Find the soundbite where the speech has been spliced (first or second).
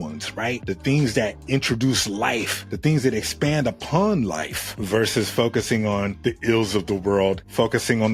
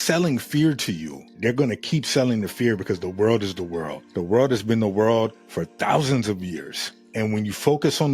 second